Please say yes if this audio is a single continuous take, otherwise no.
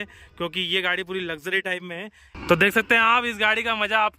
no